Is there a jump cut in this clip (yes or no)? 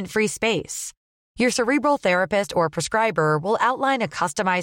no